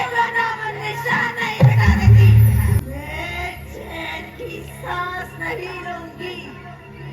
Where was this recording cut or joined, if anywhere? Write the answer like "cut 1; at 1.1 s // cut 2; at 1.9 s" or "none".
cut 1; at 2.8 s